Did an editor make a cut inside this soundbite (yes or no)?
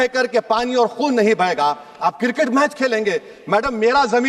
no